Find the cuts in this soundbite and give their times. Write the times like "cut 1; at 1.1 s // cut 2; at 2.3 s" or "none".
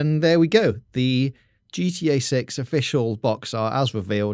none